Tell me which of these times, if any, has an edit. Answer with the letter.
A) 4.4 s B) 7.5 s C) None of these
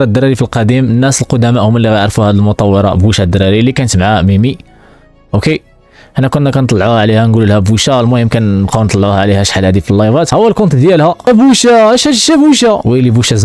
C